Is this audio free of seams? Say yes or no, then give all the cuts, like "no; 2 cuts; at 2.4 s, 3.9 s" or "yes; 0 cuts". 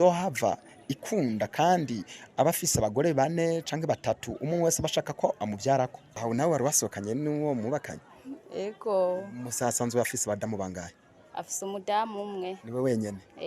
no; 1 cut; at 6.1 s